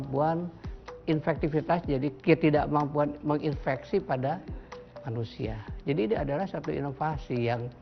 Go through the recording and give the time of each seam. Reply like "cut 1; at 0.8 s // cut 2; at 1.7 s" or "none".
cut 1; at 1.0 s // cut 2; at 2.2 s